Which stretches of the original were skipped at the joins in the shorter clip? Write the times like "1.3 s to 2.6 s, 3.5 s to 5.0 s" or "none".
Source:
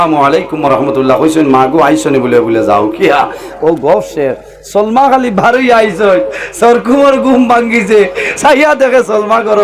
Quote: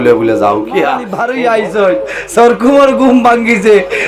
3.4 s to 5.4 s